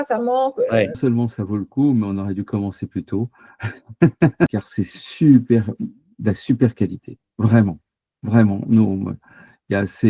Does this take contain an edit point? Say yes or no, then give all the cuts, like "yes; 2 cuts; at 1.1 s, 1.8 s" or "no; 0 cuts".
yes; 2 cuts; at 1.0 s, 4.5 s